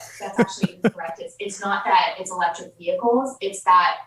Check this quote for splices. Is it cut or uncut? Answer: uncut